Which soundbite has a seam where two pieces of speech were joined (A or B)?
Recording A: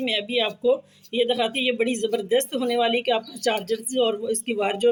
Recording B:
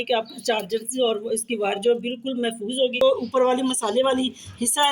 B